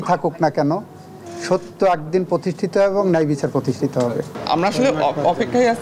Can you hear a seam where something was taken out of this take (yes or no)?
yes